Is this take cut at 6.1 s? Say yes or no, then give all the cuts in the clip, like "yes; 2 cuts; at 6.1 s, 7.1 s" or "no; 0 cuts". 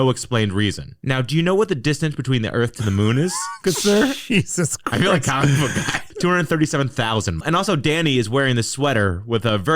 yes; 2 cuts; at 6.1 s, 7.4 s